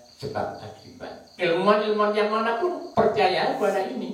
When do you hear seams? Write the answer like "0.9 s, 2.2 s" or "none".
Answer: 1.3 s, 2.8 s